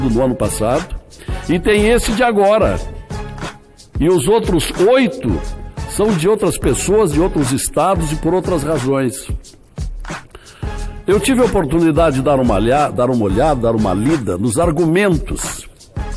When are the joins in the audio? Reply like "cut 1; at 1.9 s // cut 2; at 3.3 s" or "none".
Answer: cut 1; at 9.3 s // cut 2; at 10.9 s

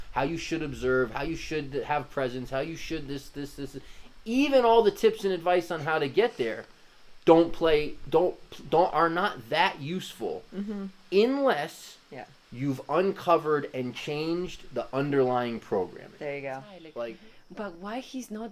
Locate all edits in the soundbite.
cut 1; at 17.2 s

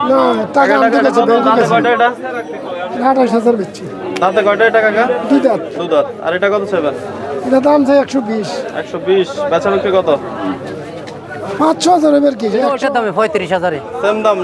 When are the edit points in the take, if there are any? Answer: cut 1; at 12.7 s

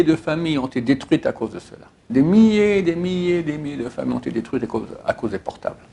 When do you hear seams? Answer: none

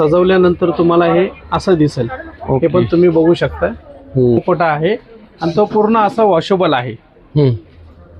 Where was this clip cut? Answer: cut 1; at 4.4 s

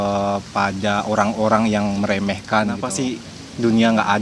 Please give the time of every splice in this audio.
cut 1; at 2.9 s

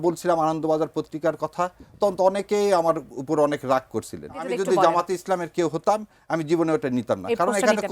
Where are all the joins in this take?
cut 1; at 4.5 s

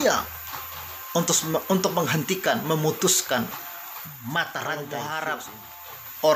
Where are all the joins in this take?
cut 1; at 4.8 s

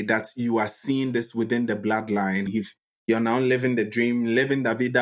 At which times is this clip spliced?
cut 1; at 2.5 s

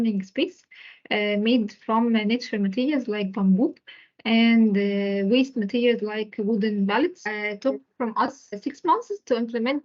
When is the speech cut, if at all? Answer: cut 1; at 7.3 s // cut 2; at 8.5 s

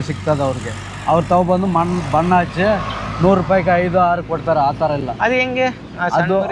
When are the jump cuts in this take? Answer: none

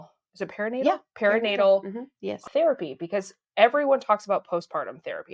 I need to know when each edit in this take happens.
cut 1; at 2.4 s

